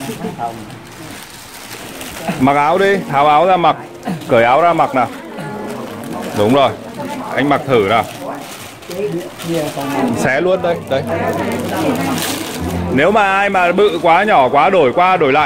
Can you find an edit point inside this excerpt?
no; 0 cuts

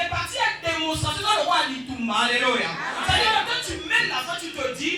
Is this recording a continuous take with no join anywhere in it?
yes; 0 cuts

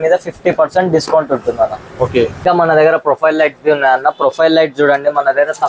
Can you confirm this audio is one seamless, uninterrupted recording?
yes; 0 cuts

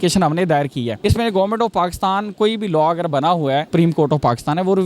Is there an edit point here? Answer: yes; 2 cuts; at 0.9 s, 3.7 s

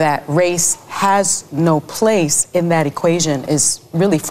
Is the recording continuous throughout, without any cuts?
yes; 0 cuts

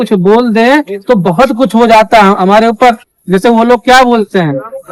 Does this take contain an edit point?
no; 0 cuts

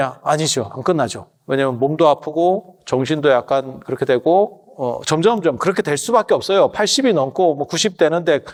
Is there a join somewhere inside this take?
no; 0 cuts

